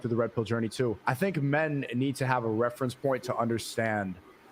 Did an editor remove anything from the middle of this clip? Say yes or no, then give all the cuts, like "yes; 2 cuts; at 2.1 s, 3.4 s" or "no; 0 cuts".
yes; 1 cut; at 1.0 s